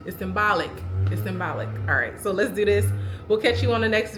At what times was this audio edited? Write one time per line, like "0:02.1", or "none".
none